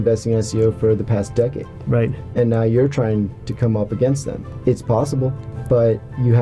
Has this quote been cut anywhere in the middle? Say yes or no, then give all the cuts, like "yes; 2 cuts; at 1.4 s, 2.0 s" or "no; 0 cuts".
yes; 2 cuts; at 4.4 s, 5.5 s